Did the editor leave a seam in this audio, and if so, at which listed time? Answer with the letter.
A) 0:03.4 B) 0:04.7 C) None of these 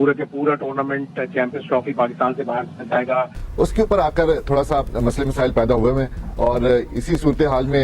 A